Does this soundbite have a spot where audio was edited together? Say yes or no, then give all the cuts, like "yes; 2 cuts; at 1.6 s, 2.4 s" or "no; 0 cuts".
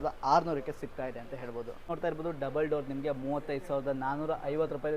yes; 1 cut; at 1.8 s